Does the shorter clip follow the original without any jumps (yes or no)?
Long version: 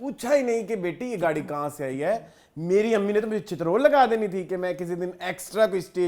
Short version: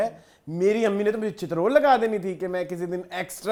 yes